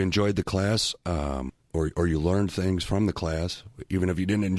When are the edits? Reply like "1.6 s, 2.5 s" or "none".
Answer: 1.6 s